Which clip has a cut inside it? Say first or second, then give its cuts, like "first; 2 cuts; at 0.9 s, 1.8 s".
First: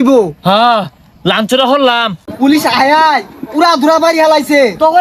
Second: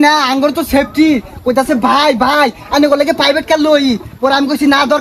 first; 1 cut; at 2.2 s